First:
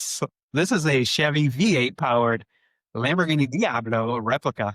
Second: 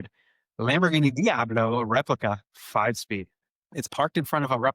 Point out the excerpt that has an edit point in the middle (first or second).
second